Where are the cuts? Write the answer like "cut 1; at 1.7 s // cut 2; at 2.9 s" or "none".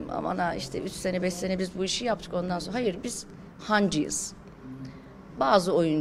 none